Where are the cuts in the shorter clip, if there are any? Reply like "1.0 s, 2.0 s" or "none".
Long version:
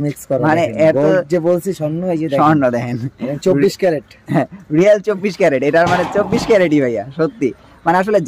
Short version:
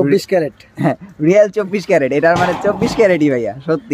none